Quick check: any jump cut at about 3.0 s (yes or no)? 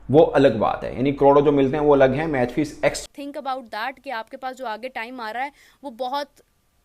yes